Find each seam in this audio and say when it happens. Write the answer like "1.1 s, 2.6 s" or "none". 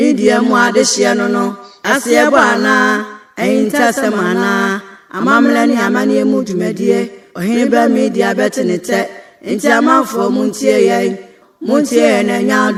none